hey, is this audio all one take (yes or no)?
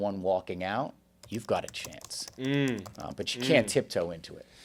yes